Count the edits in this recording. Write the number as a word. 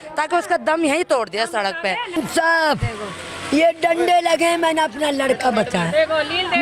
one